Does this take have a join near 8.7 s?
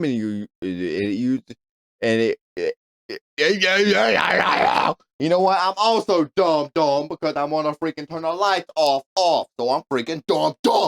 no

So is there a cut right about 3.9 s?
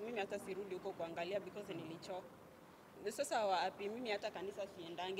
no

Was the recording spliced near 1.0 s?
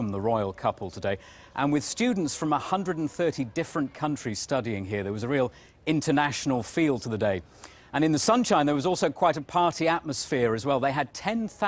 no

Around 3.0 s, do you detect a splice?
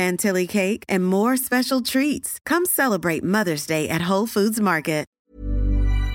no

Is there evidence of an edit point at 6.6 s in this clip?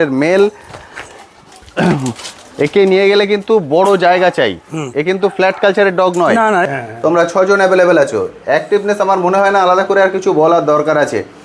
yes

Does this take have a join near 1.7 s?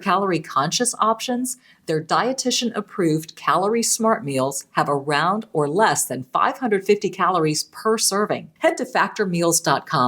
no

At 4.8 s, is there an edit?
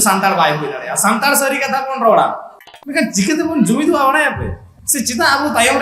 no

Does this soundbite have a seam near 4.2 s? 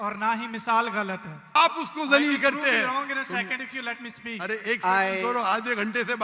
no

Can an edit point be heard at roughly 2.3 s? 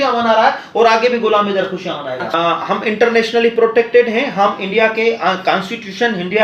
yes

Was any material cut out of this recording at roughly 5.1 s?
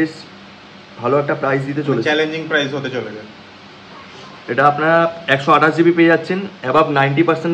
no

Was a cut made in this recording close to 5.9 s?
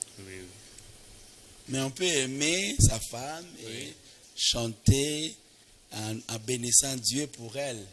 no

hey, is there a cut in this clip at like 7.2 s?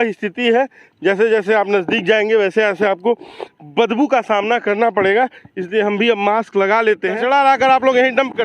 yes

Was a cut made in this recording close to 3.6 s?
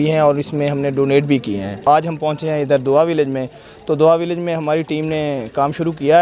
no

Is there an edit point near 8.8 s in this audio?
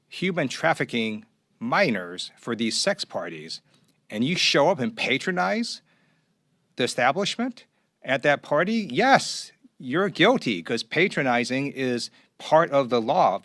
no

